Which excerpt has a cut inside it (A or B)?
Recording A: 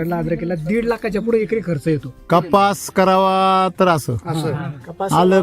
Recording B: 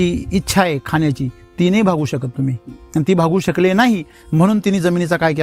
A